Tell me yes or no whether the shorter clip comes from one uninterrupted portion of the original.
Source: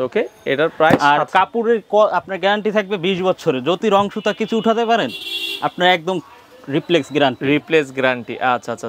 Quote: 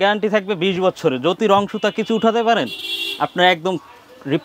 yes